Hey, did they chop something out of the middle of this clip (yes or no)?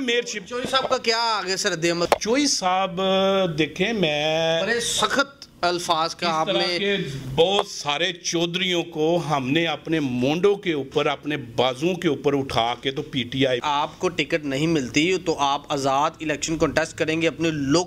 yes